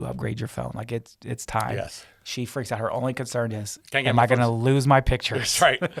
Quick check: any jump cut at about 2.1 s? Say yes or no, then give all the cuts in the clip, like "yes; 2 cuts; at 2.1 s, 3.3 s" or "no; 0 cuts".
no; 0 cuts